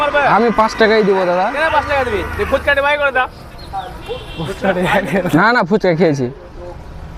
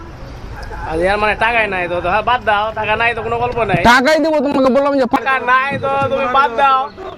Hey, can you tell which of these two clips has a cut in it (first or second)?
second